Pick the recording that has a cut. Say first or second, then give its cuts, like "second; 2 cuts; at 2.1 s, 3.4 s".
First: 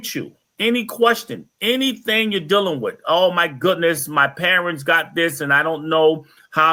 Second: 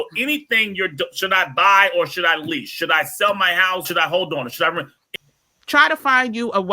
second; 2 cuts; at 3.9 s, 5.0 s